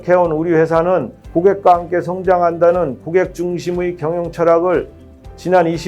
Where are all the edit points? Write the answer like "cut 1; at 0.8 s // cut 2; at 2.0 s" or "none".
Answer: none